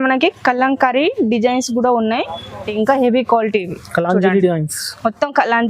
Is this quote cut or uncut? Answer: cut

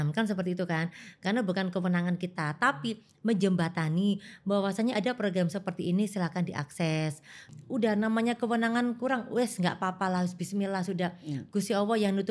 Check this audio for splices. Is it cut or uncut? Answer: cut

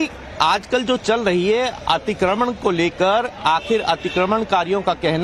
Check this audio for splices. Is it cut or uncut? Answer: uncut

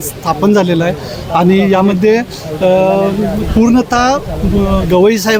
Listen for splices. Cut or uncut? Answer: uncut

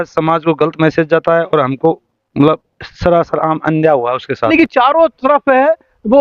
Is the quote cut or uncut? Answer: cut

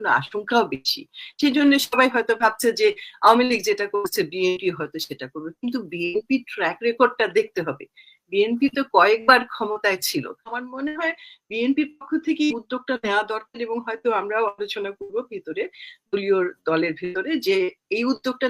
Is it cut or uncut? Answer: cut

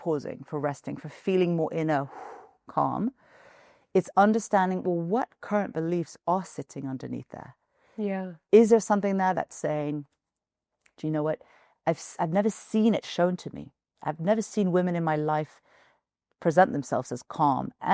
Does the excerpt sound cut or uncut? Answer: uncut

